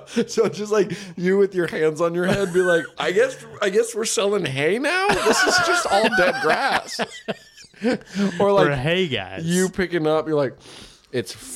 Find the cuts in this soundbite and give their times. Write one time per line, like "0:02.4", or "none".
none